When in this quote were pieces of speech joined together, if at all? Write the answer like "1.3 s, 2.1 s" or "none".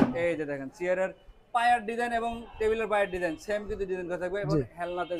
none

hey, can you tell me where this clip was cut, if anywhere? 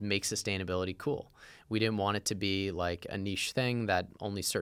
none

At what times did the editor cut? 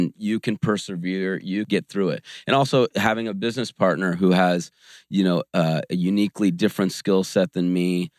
1.7 s

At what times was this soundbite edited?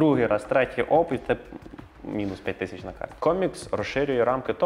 3.1 s

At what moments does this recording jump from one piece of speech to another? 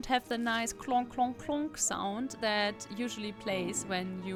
none

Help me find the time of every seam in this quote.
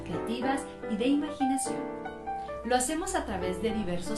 none

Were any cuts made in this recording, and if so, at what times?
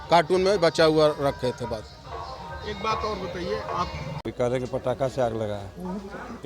4.0 s

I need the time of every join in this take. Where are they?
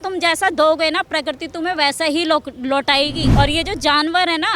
3.2 s

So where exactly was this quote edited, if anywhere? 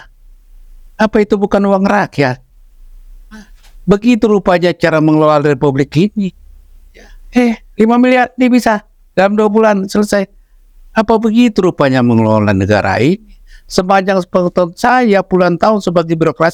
none

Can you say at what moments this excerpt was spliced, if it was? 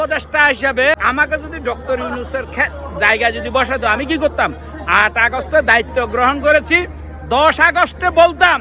1.0 s

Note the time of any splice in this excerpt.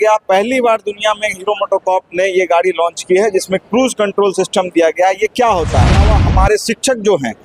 6.1 s

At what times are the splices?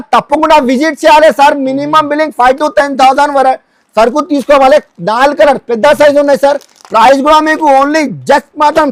none

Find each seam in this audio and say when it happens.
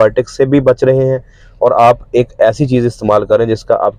none

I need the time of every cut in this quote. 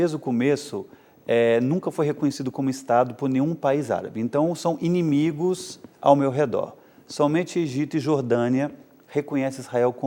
none

